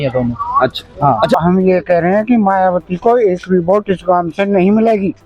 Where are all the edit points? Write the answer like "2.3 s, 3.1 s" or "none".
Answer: 1.3 s